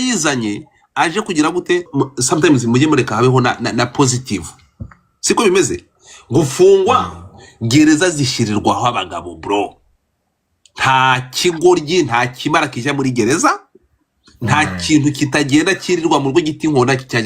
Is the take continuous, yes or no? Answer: no